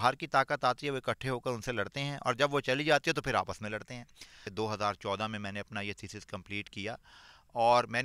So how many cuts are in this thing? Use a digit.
1